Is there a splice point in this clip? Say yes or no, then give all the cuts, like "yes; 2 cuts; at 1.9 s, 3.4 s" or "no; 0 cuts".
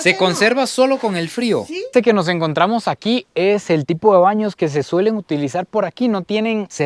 yes; 1 cut; at 1.9 s